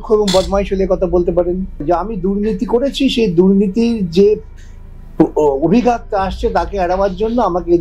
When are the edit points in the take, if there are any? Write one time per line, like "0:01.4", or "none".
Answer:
0:01.8